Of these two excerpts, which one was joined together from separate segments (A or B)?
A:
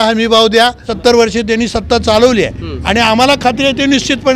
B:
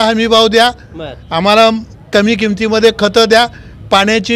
A